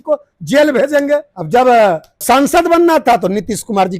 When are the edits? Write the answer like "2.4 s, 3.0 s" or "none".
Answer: 1.3 s, 2.2 s